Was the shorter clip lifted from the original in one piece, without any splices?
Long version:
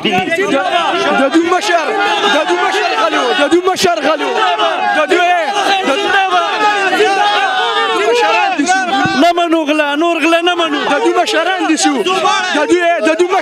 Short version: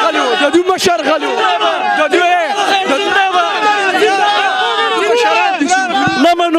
yes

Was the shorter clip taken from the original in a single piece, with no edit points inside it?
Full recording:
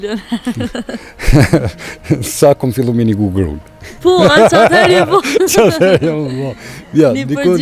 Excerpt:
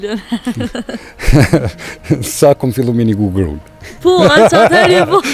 yes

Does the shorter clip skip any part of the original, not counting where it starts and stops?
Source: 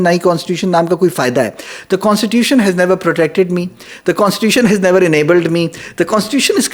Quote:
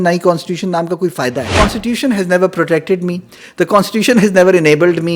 yes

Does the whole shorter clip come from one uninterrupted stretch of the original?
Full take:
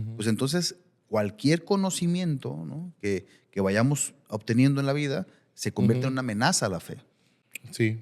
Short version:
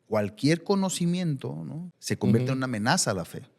no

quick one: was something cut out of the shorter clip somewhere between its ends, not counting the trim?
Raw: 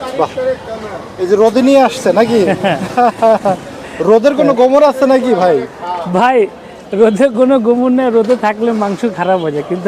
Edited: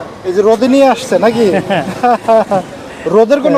no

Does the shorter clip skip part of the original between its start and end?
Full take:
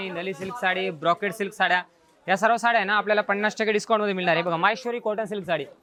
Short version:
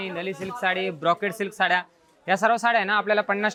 no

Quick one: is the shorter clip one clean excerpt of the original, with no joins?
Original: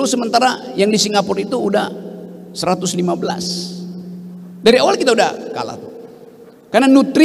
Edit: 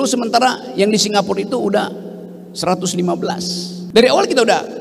no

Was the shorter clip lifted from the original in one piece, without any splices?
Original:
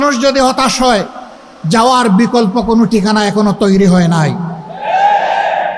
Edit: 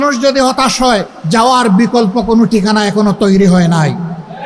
no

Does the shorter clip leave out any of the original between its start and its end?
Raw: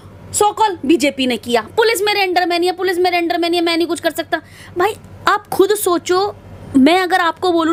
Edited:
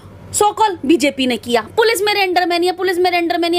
no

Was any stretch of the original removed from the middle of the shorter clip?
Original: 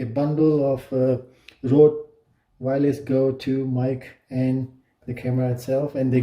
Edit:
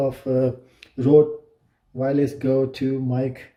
no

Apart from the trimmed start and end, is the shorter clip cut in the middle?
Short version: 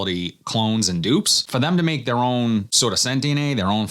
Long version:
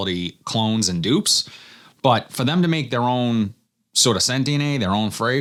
yes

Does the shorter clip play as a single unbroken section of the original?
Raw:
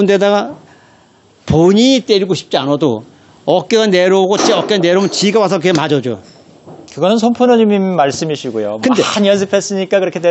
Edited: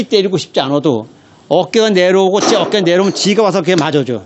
yes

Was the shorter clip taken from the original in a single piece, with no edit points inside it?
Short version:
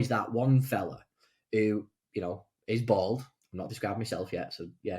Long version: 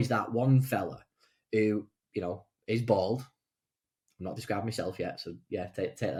no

